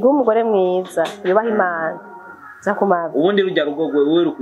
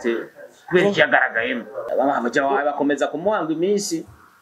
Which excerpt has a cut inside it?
second; 1 cut; at 1.9 s

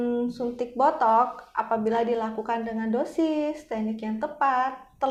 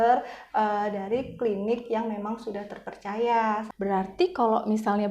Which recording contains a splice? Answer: second; 1 cut; at 3.7 s

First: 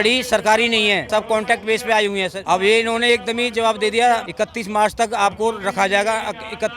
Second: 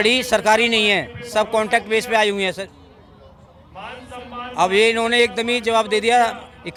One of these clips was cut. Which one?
first; 3 cuts; at 1.0 s, 2.4 s, 4.3 s

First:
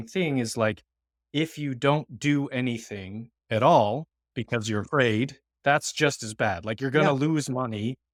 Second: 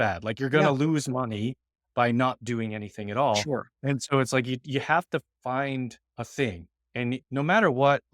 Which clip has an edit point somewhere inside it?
second; 2 cuts; at 6.0 s, 7.2 s

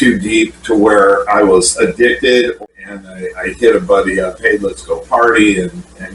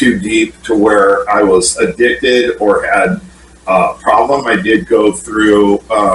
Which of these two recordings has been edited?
first; 1 cut; at 2.6 s

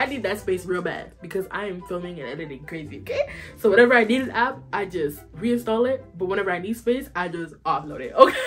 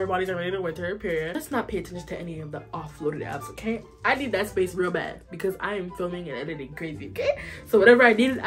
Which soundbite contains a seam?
second; 1 cut; at 0.9 s

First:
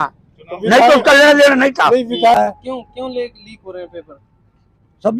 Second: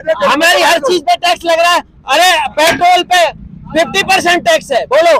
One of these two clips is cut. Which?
first; 1 cut; at 2.3 s

